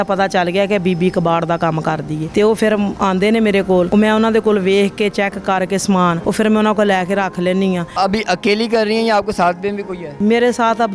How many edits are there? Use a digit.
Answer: 5